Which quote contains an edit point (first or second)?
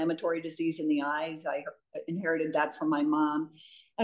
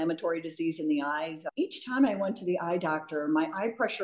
second